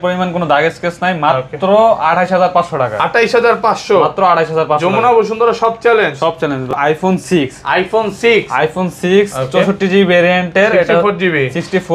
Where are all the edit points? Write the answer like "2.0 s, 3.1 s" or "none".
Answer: 6.7 s